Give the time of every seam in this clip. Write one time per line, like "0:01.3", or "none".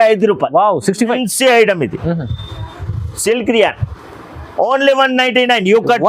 0:01.2